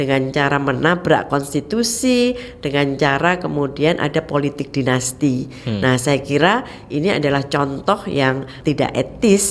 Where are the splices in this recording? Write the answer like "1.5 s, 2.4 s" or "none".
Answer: 8.5 s